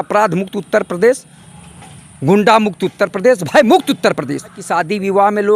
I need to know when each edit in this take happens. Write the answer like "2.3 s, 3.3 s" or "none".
4.7 s